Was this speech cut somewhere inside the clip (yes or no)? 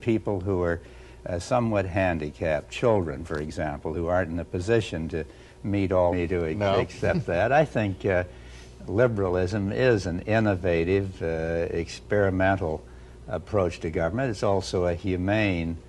no